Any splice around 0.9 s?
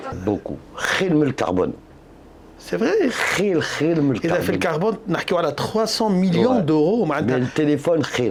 no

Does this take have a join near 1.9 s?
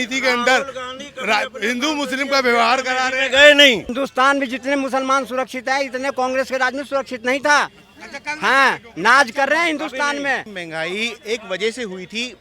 no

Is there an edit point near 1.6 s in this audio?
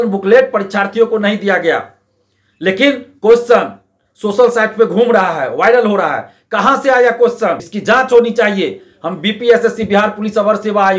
no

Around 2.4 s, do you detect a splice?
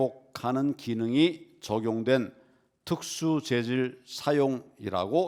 no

